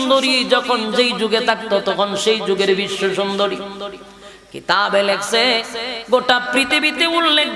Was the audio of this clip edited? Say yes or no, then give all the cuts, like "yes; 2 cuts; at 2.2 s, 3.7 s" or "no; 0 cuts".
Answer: no; 0 cuts